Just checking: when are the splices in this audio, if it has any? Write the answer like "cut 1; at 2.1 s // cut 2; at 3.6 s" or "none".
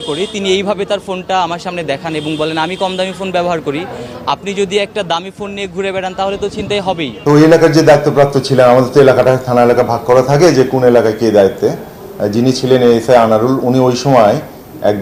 cut 1; at 7.2 s